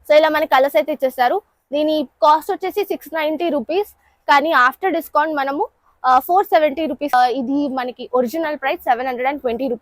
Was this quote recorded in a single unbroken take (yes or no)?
no